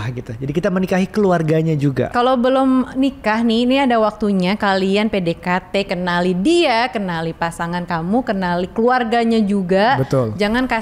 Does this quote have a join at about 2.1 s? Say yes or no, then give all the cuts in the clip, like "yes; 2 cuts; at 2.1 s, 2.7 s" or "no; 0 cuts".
yes; 1 cut; at 2.1 s